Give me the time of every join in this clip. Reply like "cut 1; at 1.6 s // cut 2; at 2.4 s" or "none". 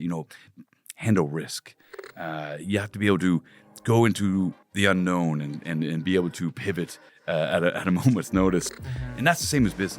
cut 1; at 8.7 s